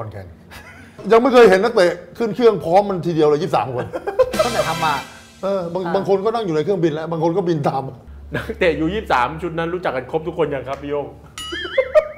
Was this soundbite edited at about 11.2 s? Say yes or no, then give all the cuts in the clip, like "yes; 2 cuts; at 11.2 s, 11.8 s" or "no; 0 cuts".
no; 2 cuts; at 1.0 s, 8.0 s